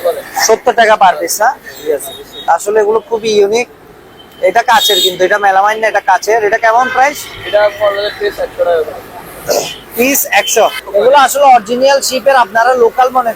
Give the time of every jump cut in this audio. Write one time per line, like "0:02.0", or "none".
0:02.3
0:10.8